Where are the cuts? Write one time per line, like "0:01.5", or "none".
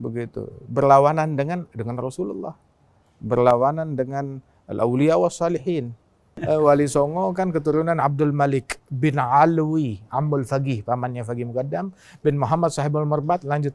0:06.4